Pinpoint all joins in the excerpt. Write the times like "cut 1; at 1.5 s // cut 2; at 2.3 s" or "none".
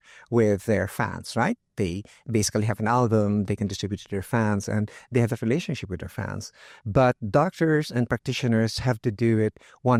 none